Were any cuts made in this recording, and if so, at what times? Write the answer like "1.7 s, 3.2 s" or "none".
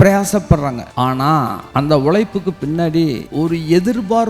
1.2 s, 3.2 s